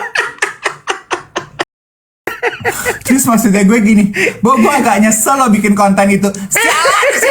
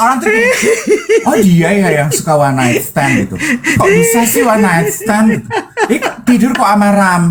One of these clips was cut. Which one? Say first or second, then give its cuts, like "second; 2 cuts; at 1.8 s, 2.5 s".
first; 1 cut; at 2.4 s